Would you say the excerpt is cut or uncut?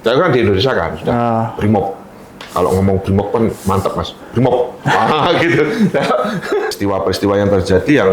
cut